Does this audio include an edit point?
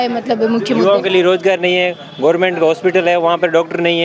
no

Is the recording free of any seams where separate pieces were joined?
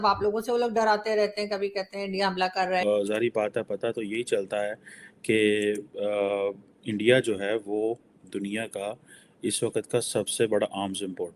no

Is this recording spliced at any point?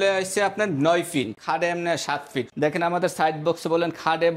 yes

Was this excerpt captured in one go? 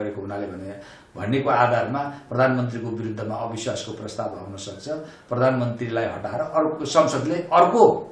yes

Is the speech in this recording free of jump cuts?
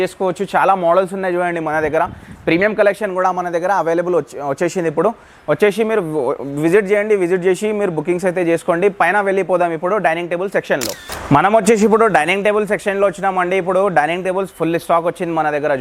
yes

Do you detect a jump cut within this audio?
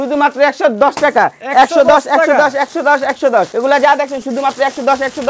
yes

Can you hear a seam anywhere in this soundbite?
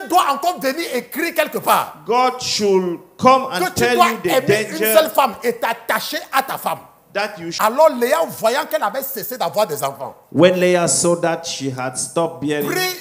yes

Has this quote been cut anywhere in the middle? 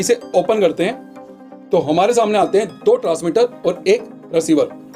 no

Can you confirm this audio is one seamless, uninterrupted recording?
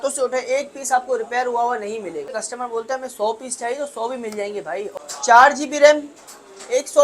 no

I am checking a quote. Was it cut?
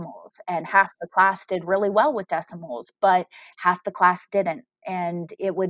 no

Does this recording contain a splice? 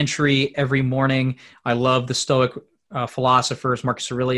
no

